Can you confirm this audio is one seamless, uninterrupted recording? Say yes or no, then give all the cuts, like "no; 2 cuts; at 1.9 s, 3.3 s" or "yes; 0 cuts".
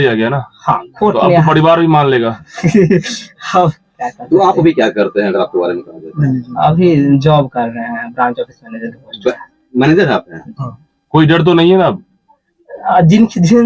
yes; 0 cuts